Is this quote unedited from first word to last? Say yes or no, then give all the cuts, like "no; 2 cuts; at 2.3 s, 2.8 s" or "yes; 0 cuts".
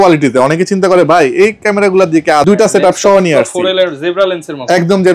no; 1 cut; at 2.4 s